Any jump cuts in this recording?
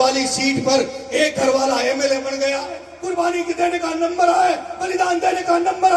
yes; 1 cut; at 2.9 s

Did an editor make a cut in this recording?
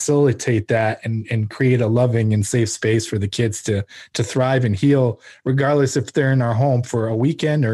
no; 0 cuts

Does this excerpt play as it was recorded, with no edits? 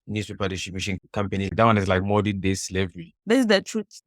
no; 2 cuts; at 1.5 s, 3.1 s

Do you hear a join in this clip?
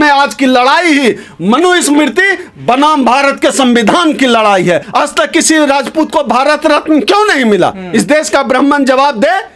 yes; 1 cut; at 4.9 s

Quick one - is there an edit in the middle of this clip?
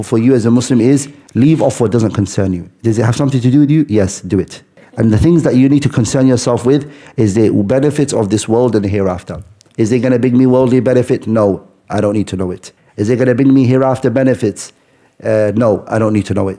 yes; 1 cut; at 1.2 s

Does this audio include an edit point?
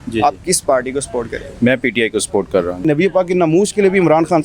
yes; 1 cut; at 2.8 s

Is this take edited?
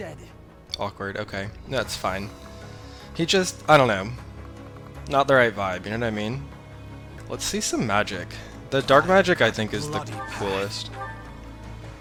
no; 0 cuts

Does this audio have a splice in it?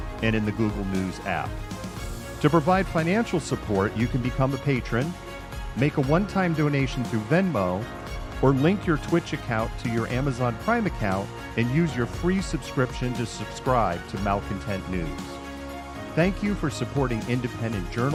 no; 0 cuts

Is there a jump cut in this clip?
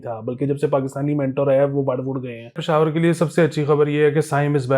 yes; 1 cut; at 2.6 s

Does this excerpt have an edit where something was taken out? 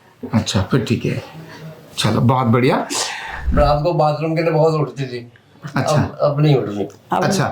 yes; 1 cut; at 3.4 s

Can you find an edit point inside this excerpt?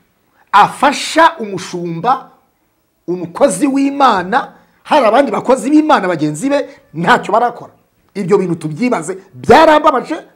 no; 0 cuts

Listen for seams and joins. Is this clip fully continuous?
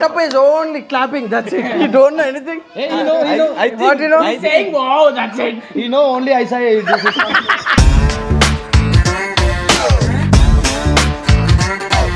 yes; 0 cuts

